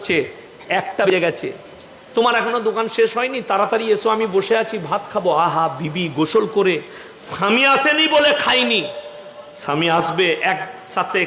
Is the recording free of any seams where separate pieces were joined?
no; 1 cut; at 1.1 s

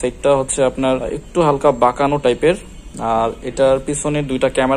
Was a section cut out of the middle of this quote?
yes; 1 cut; at 1.2 s

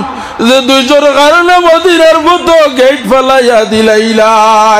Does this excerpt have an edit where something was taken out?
no; 0 cuts

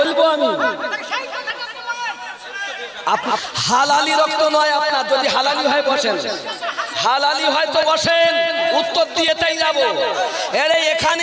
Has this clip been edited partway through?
yes; 1 cut; at 3.5 s

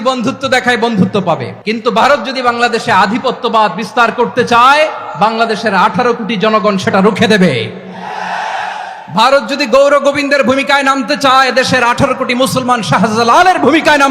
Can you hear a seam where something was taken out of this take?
yes; 1 cut; at 1.5 s

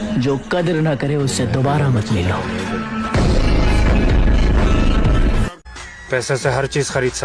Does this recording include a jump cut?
yes; 1 cut; at 5.8 s

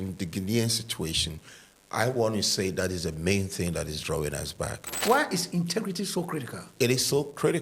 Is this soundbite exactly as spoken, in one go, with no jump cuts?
no; 2 cuts; at 5.0 s, 6.6 s

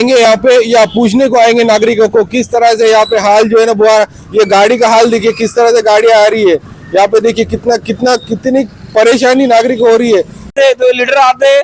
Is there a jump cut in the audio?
yes; 1 cut; at 10.5 s

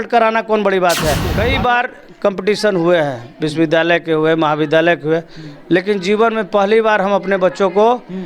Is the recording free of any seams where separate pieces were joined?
no; 1 cut; at 1.3 s

